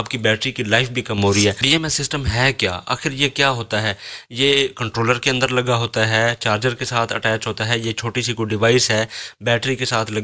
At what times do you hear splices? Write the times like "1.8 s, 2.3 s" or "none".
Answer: 1.6 s